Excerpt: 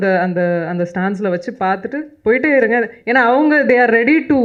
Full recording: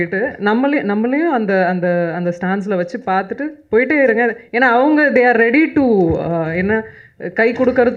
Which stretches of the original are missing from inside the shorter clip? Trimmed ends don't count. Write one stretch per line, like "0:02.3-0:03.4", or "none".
none